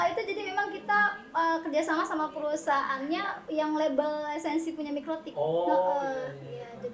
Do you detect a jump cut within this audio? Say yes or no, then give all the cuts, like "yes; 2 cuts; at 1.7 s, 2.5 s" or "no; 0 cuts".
no; 0 cuts